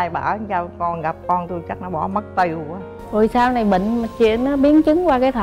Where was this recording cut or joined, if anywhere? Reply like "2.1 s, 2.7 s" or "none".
2.9 s